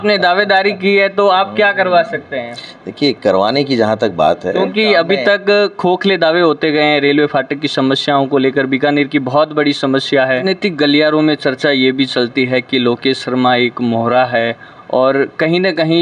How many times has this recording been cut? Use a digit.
1